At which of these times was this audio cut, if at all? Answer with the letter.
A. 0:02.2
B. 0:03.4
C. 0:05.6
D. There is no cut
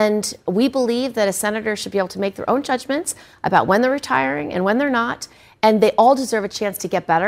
D